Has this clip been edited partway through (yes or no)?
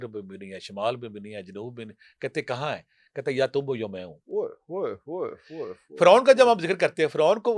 no